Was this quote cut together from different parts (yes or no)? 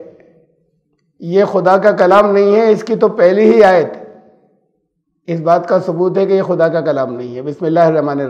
no